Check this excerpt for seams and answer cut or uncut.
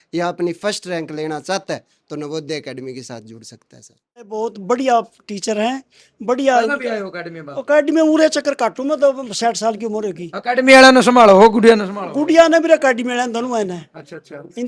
cut